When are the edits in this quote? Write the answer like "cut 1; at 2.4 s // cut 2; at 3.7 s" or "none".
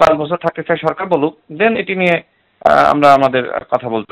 none